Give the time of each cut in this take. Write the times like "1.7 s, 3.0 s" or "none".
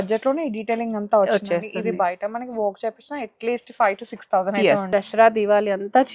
4.9 s

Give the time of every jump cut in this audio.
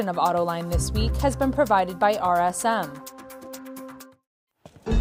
2.9 s, 4.0 s

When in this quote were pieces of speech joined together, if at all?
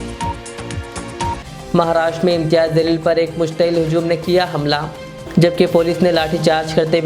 1.4 s

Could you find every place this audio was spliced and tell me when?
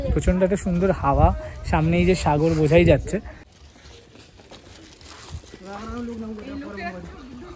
3.4 s

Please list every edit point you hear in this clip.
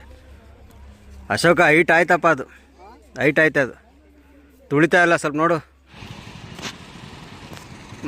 5.9 s

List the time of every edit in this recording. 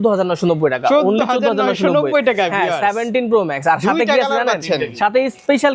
none

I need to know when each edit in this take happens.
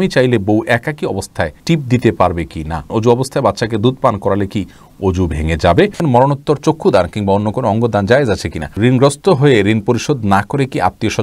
1.6 s, 2.8 s, 6.0 s, 8.7 s

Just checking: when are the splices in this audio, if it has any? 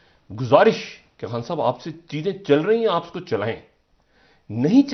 none

